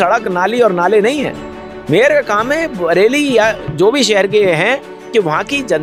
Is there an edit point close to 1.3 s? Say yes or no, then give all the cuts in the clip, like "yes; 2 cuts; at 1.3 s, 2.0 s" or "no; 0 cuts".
no; 0 cuts